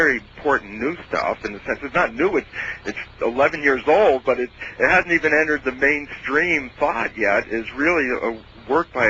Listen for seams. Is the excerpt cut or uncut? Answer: cut